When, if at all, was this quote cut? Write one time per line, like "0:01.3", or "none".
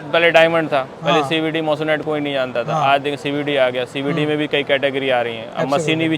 none